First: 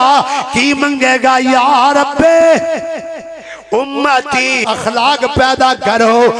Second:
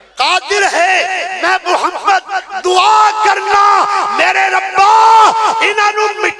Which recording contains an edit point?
first; 1 cut; at 4.7 s

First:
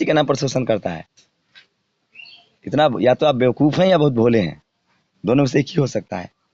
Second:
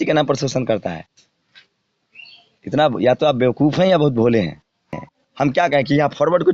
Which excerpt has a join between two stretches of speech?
second; 1 cut; at 5.1 s

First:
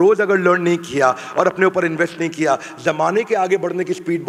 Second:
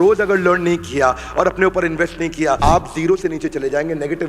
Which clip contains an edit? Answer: second; 1 cut; at 2.6 s

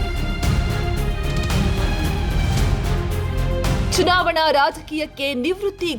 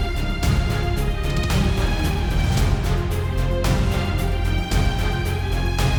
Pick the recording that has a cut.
first; 1 cut; at 3.8 s

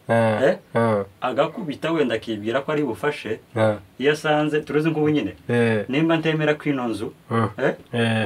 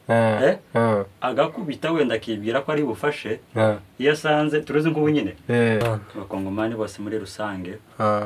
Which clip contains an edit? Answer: second; 1 cut; at 5.8 s

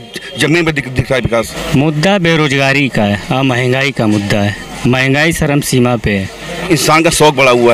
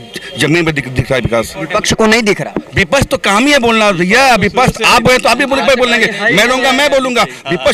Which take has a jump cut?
first; 2 cuts; at 1.6 s, 6.6 s

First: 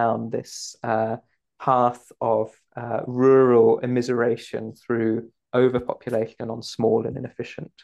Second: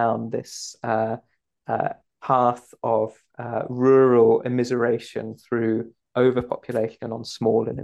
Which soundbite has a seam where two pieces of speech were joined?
first; 1 cut; at 1.5 s

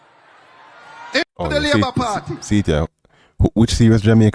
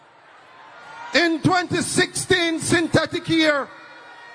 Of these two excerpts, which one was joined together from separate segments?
second; 1 cut; at 1.2 s

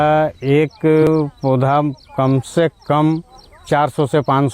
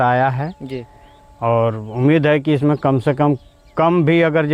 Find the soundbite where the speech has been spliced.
first; 1 cut; at 1.1 s

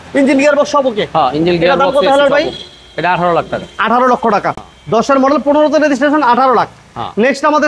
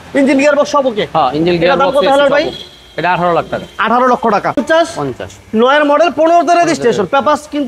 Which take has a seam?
second; 1 cut; at 4.6 s

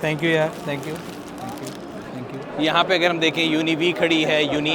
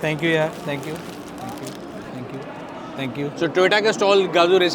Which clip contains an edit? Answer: first; 1 cut; at 2.5 s

